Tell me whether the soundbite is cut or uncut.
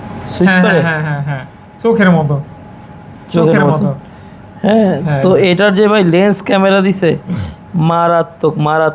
uncut